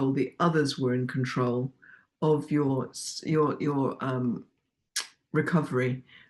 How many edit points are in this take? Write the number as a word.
zero